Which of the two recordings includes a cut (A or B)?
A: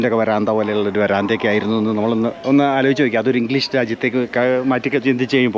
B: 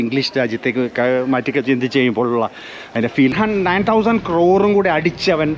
B